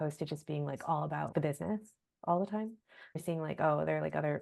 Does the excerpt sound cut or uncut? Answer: cut